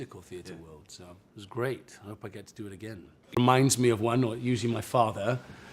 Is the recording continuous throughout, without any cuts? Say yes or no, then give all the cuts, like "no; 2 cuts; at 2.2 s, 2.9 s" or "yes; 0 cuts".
no; 1 cut; at 3.4 s